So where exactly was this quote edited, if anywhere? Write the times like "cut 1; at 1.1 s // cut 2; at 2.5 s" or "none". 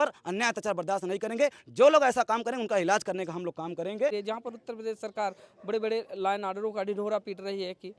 cut 1; at 4.1 s